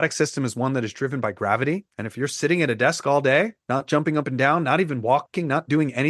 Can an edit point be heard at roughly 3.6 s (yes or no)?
yes